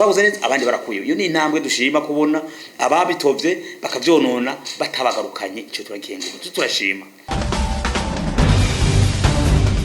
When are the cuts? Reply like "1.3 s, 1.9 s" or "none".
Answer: 7.1 s

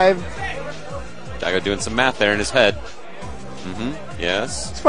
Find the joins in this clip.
none

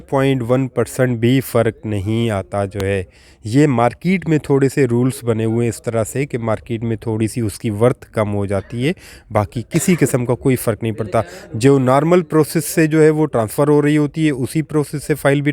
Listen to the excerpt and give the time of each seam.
none

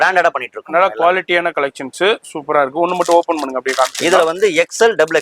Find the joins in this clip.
none

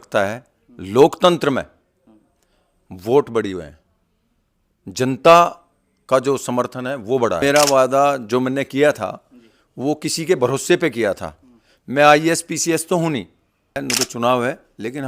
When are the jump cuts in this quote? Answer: 7.4 s, 13.8 s

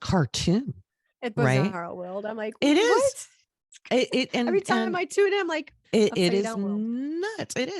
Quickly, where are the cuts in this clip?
5.8 s

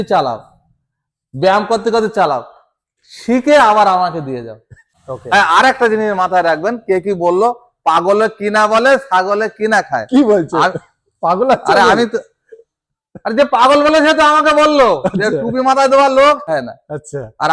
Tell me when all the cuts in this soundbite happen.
4.9 s, 16.5 s

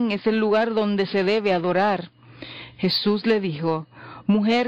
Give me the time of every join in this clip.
none

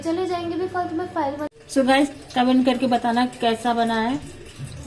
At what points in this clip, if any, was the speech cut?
1.5 s

